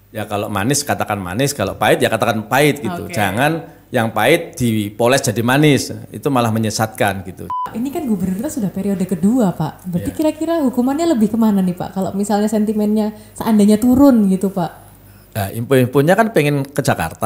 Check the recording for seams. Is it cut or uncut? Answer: cut